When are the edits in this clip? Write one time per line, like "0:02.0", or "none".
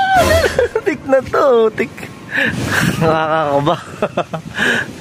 0:02.6